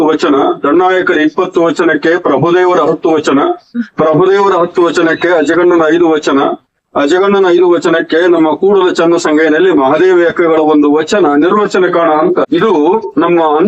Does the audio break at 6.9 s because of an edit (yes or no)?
no